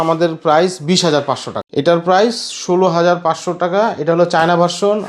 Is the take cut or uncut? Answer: cut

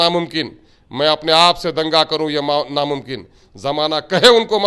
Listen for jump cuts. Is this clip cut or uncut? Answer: uncut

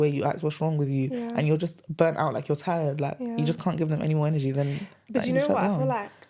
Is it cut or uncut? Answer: uncut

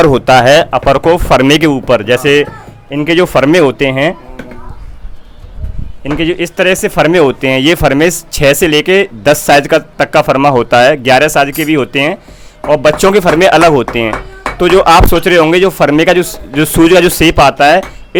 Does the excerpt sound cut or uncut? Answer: uncut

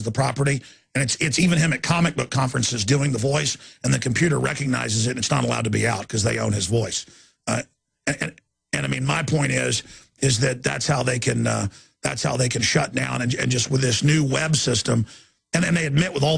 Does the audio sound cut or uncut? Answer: uncut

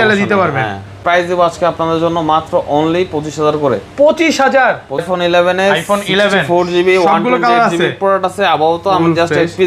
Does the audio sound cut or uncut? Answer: cut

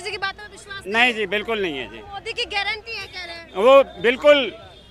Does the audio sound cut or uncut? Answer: uncut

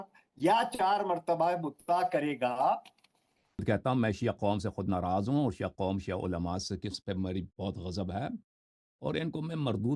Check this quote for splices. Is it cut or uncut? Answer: cut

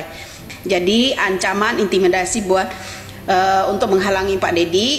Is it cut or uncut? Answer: uncut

